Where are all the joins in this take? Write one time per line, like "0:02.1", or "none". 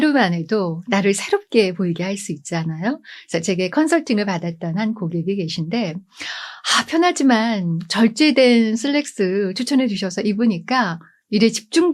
none